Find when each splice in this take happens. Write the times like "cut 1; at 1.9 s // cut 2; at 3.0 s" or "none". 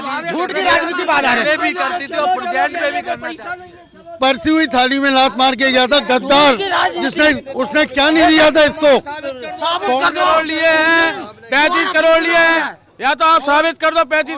none